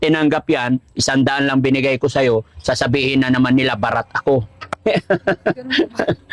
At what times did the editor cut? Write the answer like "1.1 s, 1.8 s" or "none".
none